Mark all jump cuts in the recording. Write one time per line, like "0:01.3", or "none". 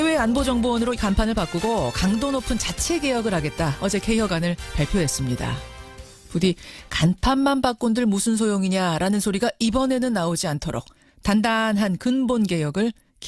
none